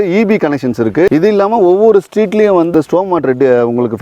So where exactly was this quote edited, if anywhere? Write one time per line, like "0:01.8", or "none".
0:01.1
0:02.7